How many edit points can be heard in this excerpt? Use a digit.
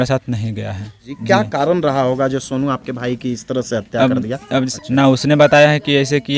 2